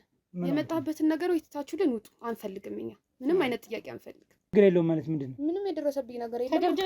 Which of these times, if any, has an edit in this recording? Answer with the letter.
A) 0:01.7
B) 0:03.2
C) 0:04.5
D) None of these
C